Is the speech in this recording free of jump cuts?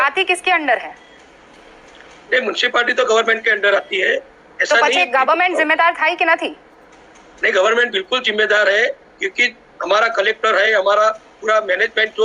yes; 0 cuts

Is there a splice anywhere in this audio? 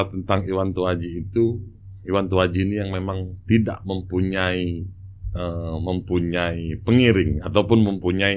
no; 0 cuts

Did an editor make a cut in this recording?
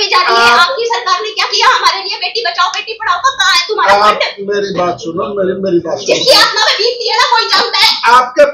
no; 0 cuts

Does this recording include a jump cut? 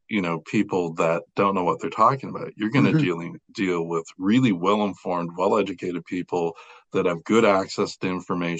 no; 0 cuts

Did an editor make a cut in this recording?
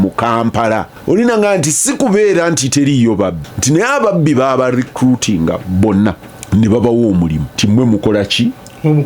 yes; 4 cuts; at 0.9 s, 3.5 s, 6.3 s, 7.5 s

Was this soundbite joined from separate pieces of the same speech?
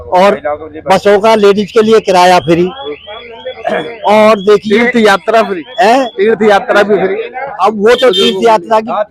no; 0 cuts

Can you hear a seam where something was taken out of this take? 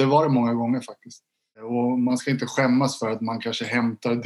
yes; 1 cut; at 1.6 s

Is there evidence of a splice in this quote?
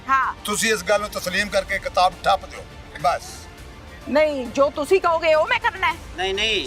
no; 0 cuts

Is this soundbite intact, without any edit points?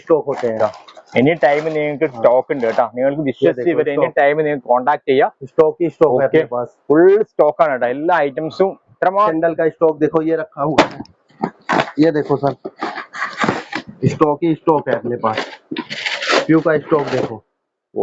no; 1 cut; at 9.3 s

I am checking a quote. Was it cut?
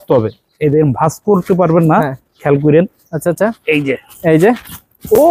no; 0 cuts

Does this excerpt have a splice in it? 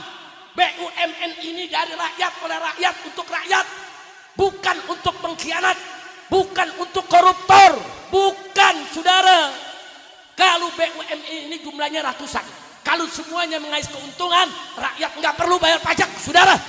no; 0 cuts

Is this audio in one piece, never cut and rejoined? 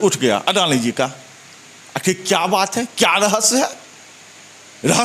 yes; 0 cuts

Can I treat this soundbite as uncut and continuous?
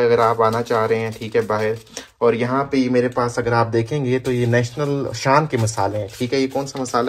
yes; 0 cuts

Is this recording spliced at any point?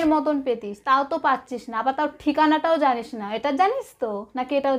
no; 0 cuts

